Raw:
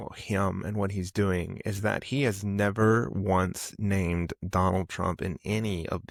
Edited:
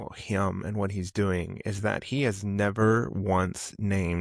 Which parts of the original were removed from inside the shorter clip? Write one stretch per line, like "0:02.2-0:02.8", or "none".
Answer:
none